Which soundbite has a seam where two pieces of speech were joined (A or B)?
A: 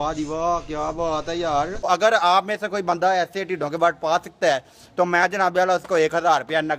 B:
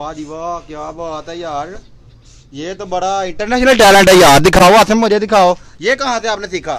A